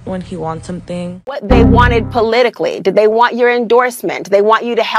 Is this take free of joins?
no; 1 cut; at 1.4 s

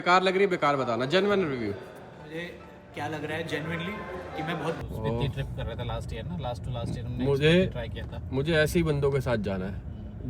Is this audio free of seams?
no; 1 cut; at 4.8 s

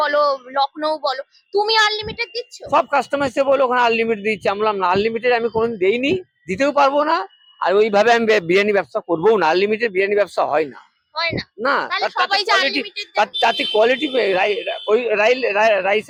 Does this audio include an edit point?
no; 0 cuts

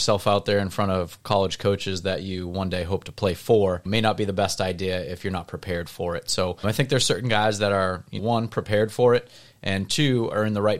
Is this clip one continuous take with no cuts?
yes; 0 cuts

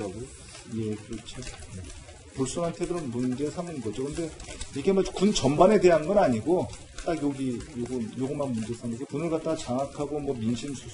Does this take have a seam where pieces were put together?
yes; 1 cut; at 9.2 s

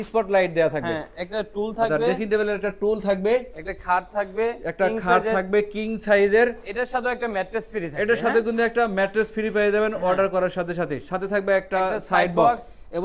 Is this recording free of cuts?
yes; 0 cuts

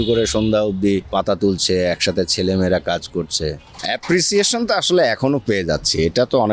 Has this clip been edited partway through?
yes; 2 cuts; at 1.1 s, 3.7 s

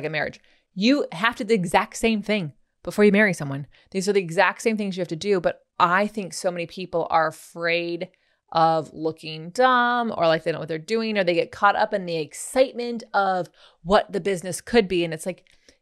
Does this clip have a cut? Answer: yes; 1 cut; at 5.6 s

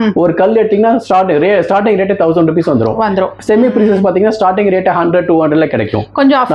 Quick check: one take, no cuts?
yes; 0 cuts

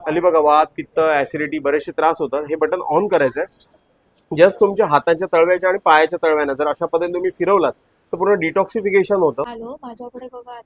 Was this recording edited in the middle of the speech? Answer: yes; 1 cut; at 9.5 s

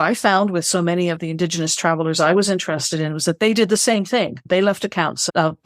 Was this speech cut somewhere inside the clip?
yes; 1 cut; at 4.4 s

